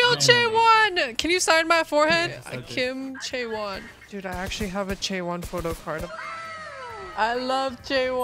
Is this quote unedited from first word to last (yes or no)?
no